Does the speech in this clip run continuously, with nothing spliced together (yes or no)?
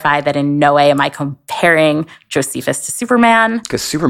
yes